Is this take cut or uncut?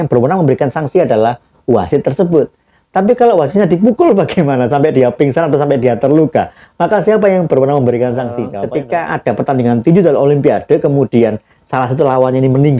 cut